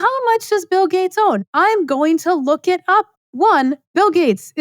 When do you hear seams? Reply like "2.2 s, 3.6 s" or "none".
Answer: 3.1 s